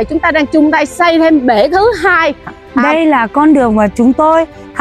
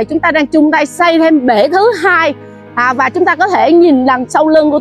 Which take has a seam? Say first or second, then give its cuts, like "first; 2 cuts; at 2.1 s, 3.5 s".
first; 1 cut; at 2.6 s